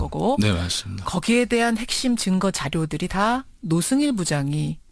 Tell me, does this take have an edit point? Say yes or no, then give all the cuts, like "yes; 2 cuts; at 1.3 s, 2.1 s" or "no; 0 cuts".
no; 0 cuts